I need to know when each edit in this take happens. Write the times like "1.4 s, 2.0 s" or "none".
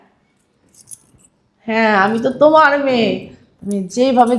none